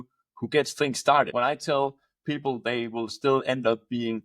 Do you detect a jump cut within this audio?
yes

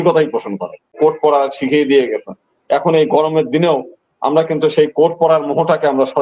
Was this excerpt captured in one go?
no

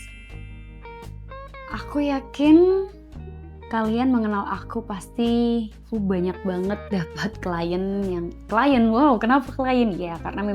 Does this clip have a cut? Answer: yes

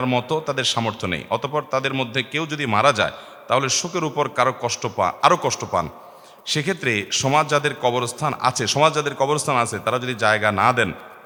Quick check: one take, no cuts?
yes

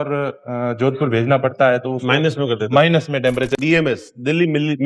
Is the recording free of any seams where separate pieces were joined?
no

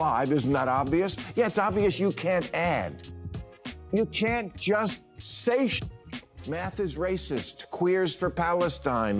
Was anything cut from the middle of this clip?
yes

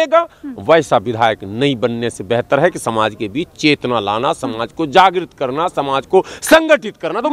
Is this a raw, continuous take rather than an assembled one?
yes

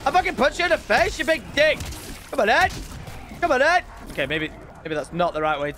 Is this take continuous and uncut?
no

